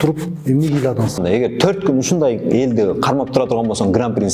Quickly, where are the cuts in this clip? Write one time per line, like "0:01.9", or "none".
0:01.2